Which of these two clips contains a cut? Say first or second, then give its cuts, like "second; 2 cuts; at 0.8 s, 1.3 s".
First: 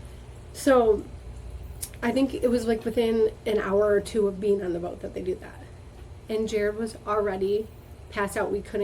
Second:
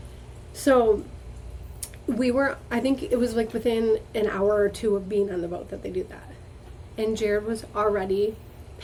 first; 1 cut; at 1.9 s